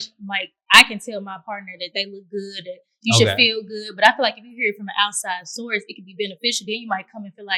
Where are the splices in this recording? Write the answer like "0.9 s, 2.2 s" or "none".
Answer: none

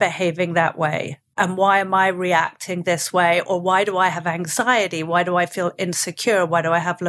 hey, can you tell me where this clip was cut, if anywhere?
1.4 s

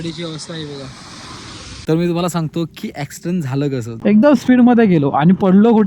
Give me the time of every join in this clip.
1.8 s, 4.0 s

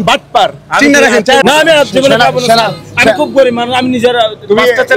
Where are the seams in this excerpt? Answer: 1.4 s

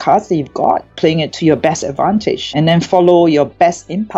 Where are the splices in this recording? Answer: 0.9 s

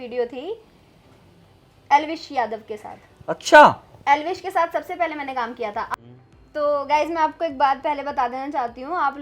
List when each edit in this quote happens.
5.9 s

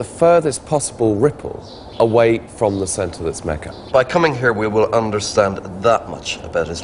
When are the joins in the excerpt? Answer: none

